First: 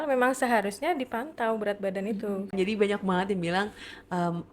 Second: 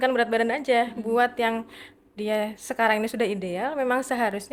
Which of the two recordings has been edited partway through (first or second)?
first